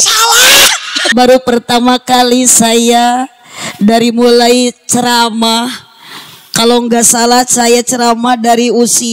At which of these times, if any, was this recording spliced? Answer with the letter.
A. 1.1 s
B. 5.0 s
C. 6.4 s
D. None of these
A